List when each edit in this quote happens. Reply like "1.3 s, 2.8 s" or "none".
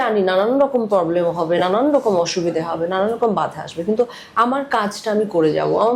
none